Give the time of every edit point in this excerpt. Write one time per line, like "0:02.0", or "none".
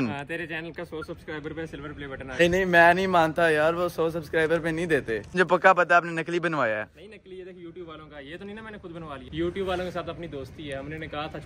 0:02.4
0:05.3
0:09.2